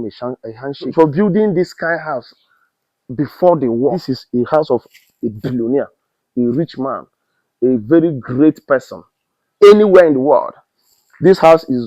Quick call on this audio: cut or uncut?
cut